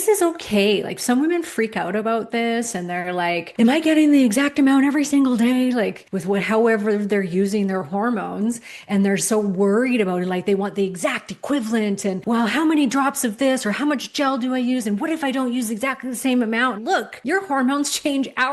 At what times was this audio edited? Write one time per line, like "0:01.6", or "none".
0:03.5
0:06.1
0:12.2
0:16.8